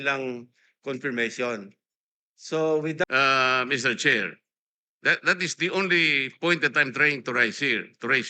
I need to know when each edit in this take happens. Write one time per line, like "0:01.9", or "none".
0:03.0

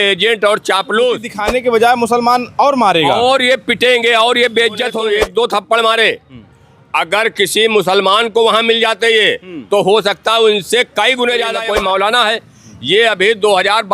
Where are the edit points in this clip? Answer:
0:01.4
0:05.0
0:11.6

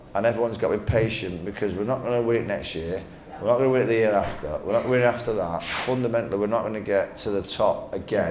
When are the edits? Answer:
0:05.8

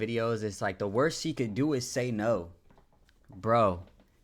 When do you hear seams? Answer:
none

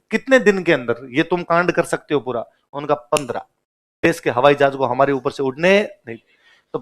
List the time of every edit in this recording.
0:04.0

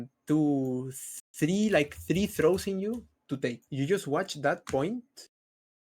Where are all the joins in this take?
0:03.6

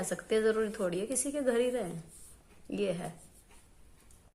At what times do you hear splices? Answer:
none

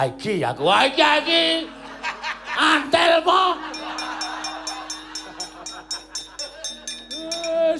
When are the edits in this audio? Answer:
none

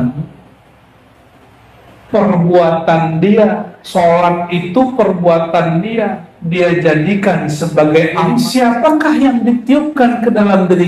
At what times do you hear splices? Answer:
0:08.3

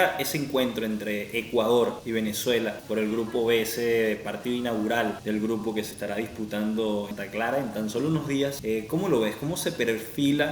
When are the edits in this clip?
none

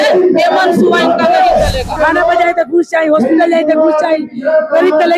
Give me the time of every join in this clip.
0:02.0

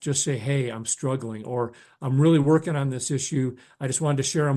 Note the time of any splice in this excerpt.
none

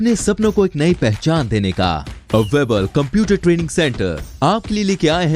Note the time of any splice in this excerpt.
none

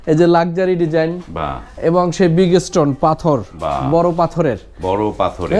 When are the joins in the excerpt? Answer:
none

